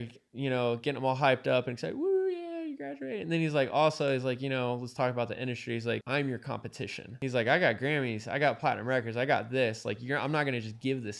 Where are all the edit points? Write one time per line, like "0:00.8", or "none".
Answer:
0:06.0
0:07.1